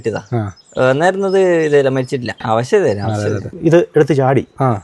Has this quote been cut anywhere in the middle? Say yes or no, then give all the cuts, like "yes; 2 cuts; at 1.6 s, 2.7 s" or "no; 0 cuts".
yes; 2 cuts; at 2.4 s, 3.5 s